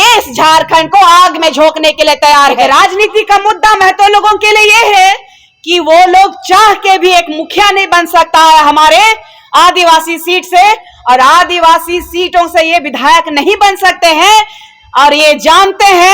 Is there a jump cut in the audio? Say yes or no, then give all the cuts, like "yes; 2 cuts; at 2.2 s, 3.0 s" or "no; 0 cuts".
yes; 1 cut; at 2.7 s